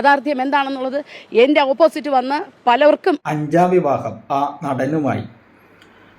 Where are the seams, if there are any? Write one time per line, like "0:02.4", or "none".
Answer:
0:03.2